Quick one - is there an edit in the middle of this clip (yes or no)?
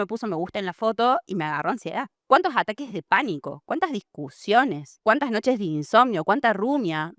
no